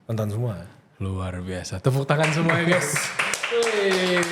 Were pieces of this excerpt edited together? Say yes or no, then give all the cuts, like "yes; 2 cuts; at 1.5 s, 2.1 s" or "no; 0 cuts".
no; 0 cuts